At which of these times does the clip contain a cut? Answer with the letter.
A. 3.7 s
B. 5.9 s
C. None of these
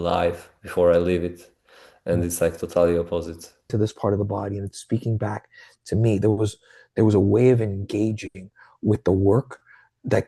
A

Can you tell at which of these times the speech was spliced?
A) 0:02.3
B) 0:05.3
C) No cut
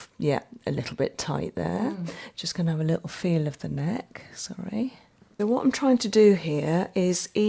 B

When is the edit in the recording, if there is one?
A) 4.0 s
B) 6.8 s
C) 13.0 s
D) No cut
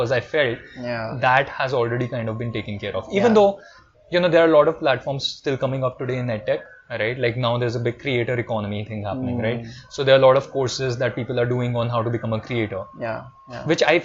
D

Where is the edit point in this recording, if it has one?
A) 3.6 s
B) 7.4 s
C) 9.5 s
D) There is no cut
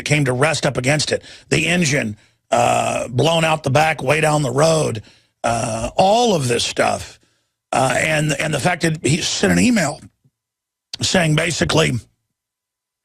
C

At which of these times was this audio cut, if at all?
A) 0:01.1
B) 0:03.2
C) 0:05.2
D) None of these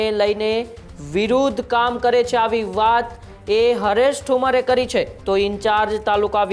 C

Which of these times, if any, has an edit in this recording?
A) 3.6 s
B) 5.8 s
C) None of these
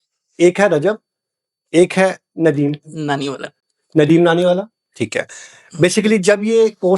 C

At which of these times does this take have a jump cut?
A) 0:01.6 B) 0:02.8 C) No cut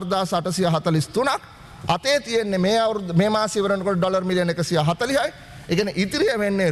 C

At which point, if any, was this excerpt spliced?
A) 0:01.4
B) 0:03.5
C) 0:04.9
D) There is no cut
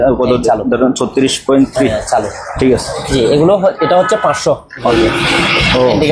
C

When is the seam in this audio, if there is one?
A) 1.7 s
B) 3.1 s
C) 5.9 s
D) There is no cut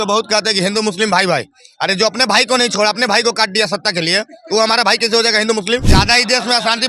C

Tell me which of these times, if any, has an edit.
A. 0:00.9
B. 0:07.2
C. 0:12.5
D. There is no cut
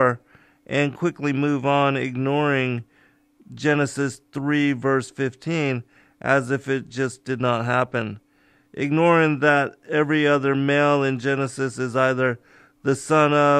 B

